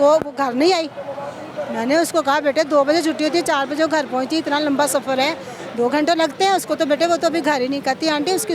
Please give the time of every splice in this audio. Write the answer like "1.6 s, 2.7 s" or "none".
none